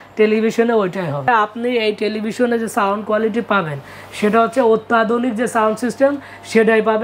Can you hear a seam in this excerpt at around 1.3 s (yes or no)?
yes